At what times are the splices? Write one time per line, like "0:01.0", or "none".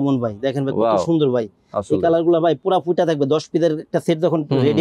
none